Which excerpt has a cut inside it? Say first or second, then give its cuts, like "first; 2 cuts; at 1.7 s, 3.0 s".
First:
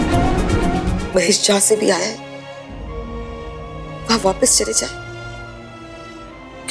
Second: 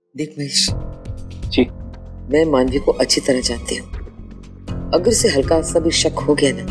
first; 1 cut; at 0.9 s